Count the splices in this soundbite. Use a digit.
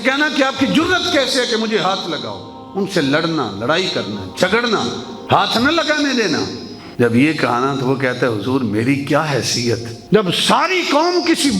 1